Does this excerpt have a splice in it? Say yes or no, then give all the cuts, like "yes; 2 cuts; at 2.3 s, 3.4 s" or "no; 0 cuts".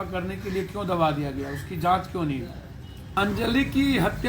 yes; 1 cut; at 3.1 s